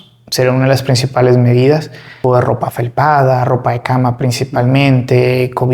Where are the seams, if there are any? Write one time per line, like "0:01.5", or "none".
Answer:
0:02.2